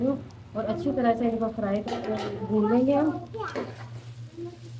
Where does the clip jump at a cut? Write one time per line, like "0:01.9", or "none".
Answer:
none